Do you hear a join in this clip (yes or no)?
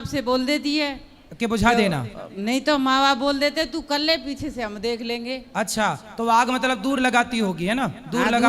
no